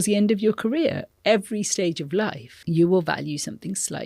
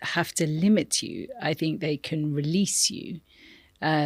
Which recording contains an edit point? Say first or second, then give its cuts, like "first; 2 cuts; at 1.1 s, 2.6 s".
first; 2 cuts; at 1.1 s, 2.5 s